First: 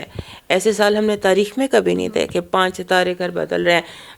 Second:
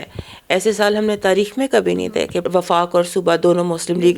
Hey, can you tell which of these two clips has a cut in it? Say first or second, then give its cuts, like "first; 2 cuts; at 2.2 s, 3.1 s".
second; 1 cut; at 2.4 s